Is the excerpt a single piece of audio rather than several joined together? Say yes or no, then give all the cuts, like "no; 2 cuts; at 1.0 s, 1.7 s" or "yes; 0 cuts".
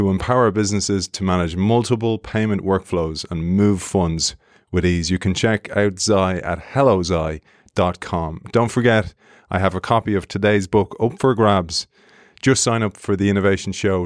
yes; 0 cuts